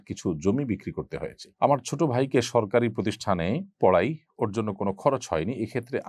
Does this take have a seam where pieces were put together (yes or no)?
no